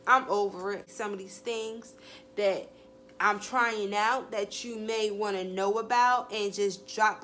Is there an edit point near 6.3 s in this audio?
no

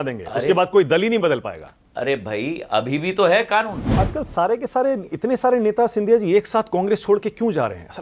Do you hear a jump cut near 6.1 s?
no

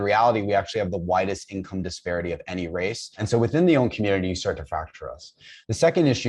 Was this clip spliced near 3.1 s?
yes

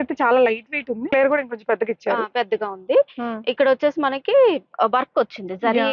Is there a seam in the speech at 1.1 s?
yes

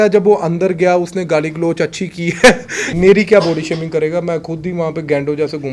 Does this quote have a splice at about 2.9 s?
yes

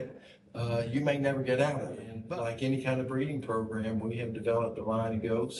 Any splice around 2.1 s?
yes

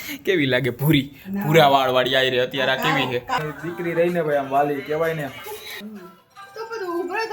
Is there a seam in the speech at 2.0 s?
no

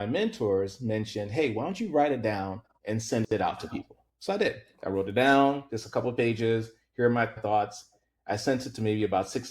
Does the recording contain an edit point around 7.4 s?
yes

